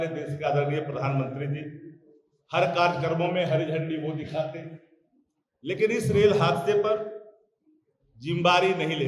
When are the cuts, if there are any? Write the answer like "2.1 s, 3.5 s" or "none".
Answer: none